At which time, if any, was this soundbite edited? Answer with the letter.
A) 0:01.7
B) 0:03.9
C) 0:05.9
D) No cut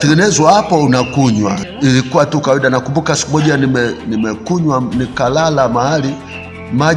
A